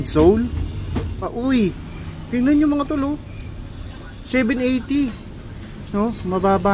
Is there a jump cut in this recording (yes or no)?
yes